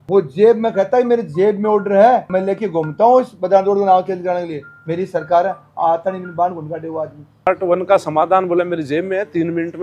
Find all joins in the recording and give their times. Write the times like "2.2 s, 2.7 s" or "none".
7.5 s